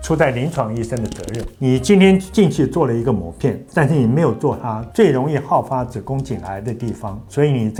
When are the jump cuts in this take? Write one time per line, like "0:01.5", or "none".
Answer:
none